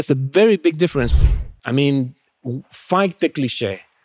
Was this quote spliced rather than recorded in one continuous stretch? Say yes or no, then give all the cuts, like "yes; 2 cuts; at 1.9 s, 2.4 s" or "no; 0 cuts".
yes; 1 cut; at 1.1 s